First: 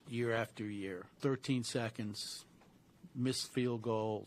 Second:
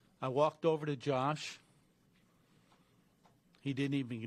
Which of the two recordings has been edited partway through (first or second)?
first